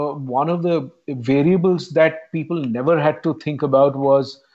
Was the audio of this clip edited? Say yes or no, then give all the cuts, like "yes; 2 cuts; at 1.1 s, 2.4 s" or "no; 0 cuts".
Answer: no; 0 cuts